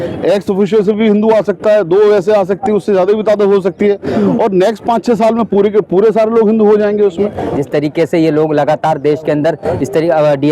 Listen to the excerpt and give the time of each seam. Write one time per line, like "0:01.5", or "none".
0:07.4